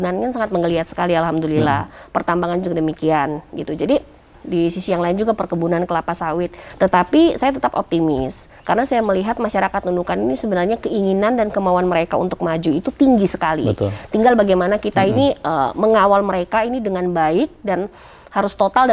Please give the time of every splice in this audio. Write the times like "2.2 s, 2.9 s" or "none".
4.4 s, 6.6 s